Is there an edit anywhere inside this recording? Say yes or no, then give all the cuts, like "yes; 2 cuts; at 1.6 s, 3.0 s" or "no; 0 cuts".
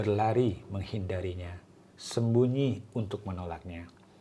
no; 0 cuts